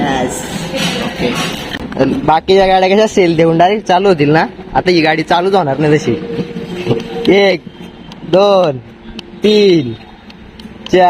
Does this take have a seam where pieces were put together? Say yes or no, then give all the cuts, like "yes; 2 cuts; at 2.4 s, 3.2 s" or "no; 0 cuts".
yes; 1 cut; at 1.6 s